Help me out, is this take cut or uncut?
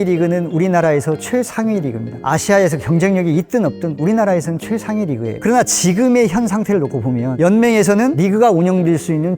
cut